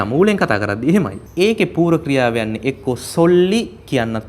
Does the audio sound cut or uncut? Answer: uncut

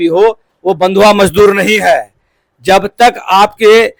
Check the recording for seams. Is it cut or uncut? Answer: uncut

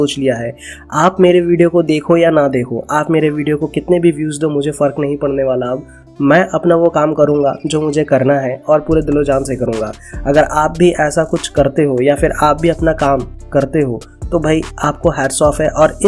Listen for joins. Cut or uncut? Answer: uncut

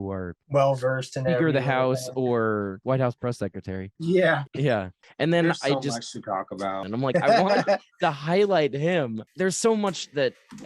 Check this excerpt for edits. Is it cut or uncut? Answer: cut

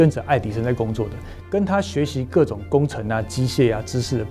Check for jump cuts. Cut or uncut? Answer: uncut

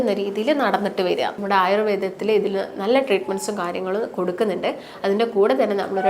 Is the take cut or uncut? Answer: cut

